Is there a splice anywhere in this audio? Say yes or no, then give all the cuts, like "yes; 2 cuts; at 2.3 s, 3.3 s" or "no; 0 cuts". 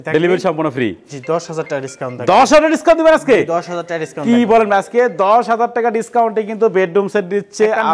no; 0 cuts